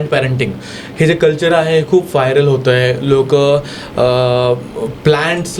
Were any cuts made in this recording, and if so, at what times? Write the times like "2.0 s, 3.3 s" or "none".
none